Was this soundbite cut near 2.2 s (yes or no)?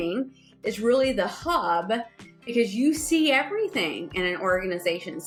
no